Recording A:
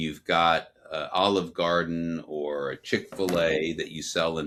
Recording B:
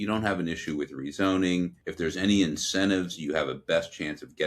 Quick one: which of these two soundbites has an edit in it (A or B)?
B